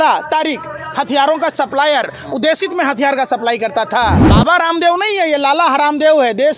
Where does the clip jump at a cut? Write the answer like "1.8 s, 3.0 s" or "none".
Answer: 4.2 s